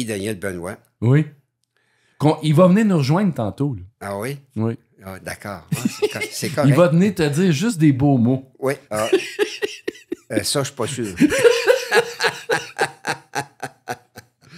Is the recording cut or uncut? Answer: uncut